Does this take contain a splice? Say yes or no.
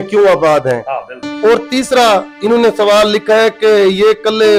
no